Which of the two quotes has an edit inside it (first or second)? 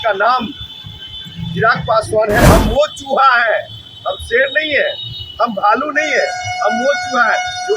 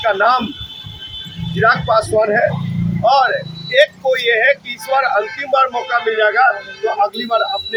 first